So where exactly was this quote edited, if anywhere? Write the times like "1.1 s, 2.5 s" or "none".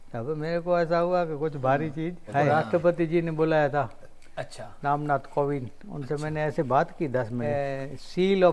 2.5 s, 7.4 s